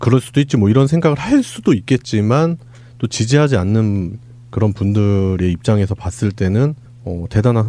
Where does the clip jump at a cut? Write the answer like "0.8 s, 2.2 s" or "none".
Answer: none